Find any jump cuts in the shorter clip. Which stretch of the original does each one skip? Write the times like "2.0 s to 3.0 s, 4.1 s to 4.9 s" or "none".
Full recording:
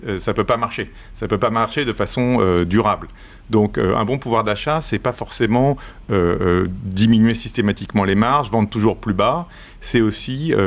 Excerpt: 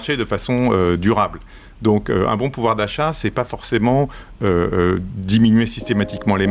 none

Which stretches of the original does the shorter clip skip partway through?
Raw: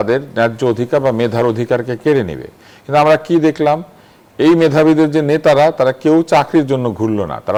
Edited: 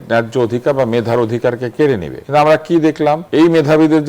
2.4 s to 2.7 s, 3.8 s to 4.3 s

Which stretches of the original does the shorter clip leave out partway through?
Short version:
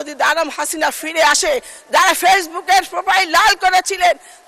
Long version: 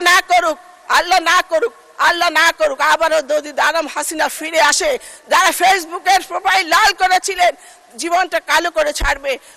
none

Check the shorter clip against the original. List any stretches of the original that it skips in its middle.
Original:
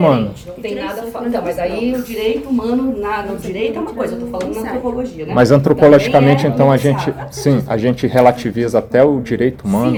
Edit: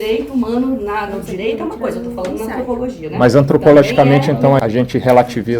6.8 s to 7.7 s

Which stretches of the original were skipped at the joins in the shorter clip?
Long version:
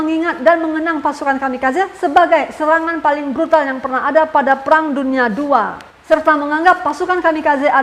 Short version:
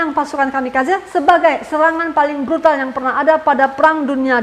none

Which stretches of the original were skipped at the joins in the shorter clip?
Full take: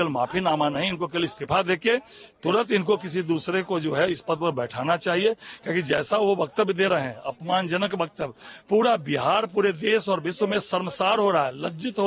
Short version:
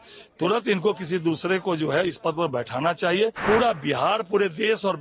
5.4 s to 8.6 s

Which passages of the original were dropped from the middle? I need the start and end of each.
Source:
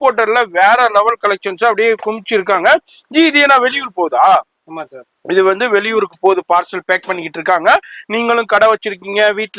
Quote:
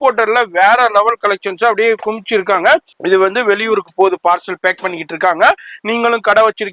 2.9 s to 5.2 s

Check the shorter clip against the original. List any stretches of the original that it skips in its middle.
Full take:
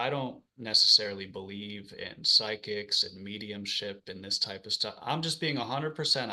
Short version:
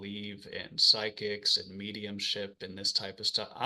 none

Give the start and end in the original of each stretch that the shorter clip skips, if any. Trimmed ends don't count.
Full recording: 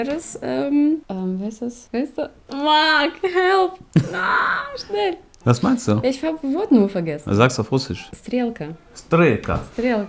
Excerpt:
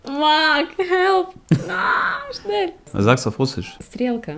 5.3 s to 7.2 s

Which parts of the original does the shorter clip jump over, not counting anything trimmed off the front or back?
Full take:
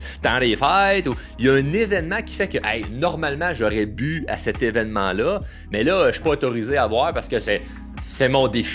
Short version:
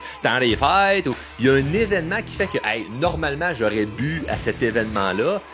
none

